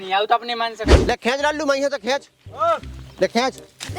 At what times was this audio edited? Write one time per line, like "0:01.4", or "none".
0:00.9